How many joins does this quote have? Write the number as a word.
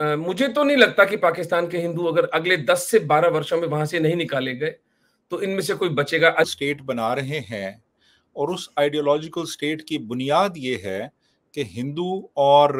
one